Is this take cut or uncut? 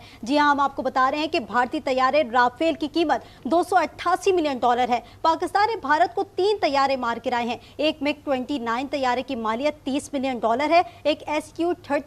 uncut